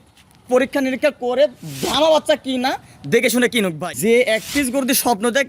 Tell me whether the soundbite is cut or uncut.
cut